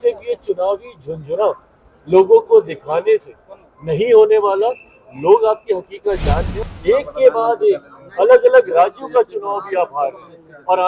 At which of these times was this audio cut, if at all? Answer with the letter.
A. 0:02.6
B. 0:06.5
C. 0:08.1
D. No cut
B